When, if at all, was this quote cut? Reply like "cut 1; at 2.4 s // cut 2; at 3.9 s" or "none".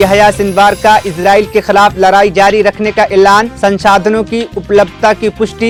none